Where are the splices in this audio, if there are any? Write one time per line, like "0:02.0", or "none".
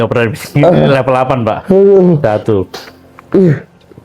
none

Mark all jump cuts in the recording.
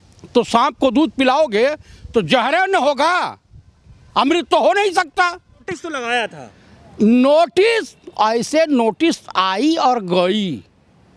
0:05.7

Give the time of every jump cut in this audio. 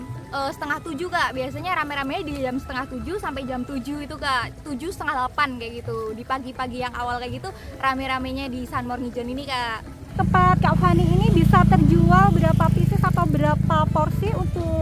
0:10.1

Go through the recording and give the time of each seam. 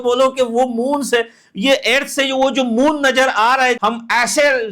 0:03.8

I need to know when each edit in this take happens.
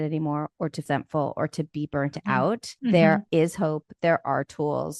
0:00.8
0:02.7
0:03.2

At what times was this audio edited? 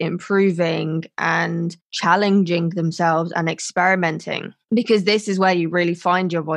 none

